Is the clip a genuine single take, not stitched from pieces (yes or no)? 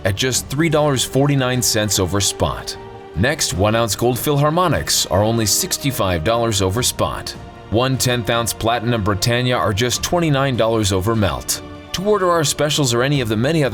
yes